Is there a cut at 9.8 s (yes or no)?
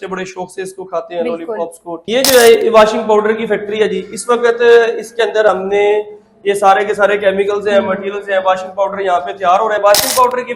yes